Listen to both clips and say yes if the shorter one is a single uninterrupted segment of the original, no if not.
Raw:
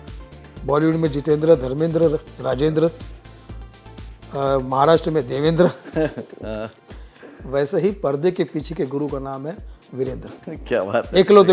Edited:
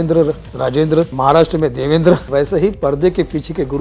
no